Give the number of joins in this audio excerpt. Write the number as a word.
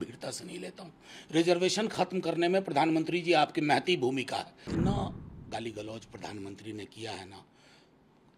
one